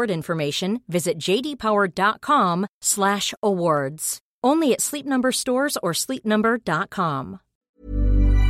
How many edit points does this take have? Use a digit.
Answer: 1